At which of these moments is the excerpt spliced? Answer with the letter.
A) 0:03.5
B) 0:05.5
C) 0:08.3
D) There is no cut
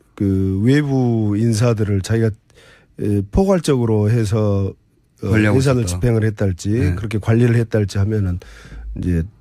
A